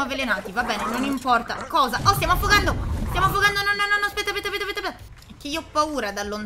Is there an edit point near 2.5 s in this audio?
no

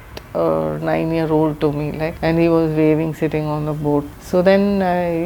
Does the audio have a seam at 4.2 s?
no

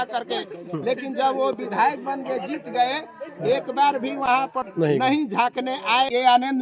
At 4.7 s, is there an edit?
yes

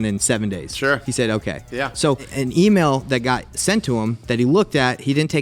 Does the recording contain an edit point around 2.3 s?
yes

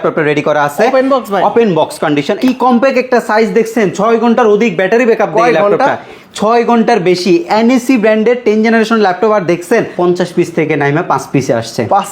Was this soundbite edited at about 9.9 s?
yes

